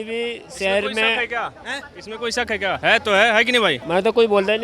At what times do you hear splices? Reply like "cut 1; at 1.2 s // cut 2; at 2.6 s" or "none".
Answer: cut 1; at 2.8 s // cut 2; at 3.8 s